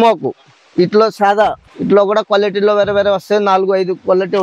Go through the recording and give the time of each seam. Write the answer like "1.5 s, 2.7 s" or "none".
1.7 s